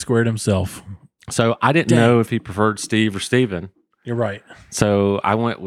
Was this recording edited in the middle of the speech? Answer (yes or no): no